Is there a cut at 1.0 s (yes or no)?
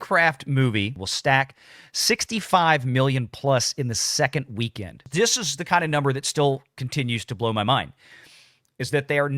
yes